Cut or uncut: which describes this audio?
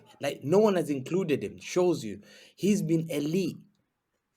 uncut